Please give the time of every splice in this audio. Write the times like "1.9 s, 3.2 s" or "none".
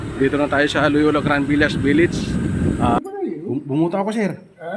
3.0 s